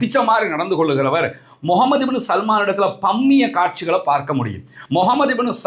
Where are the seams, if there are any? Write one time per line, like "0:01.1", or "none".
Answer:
0:04.7